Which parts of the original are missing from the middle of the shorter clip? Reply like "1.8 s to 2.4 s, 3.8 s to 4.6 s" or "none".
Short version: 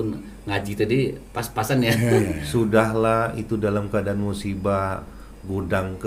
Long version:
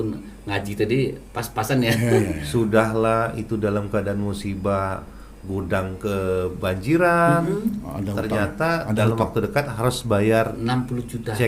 none